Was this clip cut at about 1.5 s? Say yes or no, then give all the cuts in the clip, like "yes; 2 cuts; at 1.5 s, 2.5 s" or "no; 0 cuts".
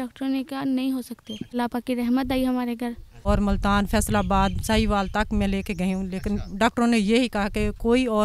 yes; 2 cuts; at 1.5 s, 3.3 s